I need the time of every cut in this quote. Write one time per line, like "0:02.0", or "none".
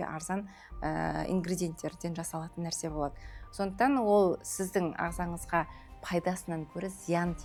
none